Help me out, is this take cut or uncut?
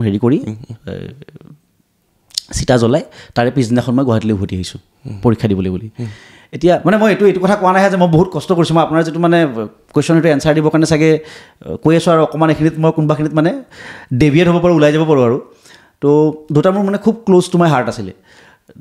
uncut